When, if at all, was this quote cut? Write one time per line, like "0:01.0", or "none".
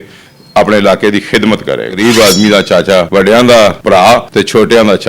0:01.9
0:03.1
0:04.1